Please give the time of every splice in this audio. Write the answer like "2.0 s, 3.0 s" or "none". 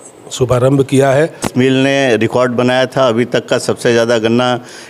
1.5 s